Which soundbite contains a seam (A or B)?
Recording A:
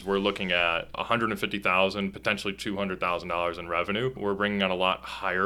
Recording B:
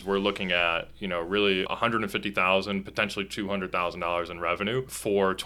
A